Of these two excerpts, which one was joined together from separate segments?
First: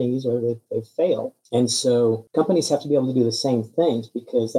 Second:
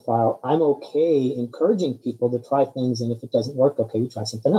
first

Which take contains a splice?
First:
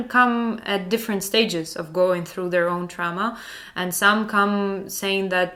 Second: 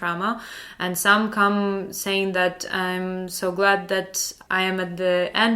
second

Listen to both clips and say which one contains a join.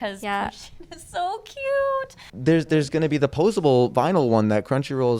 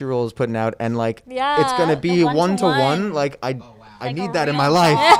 first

